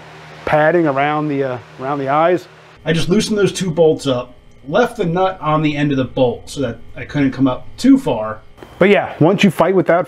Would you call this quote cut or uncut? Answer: cut